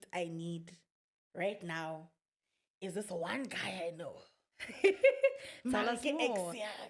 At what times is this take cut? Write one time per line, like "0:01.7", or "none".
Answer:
none